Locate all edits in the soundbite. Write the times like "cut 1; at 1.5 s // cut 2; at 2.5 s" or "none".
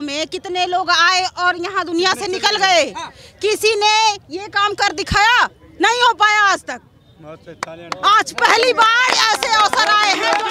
none